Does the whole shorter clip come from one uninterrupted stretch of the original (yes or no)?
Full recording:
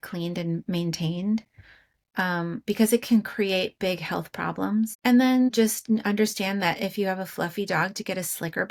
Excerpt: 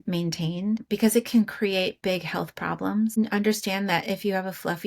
no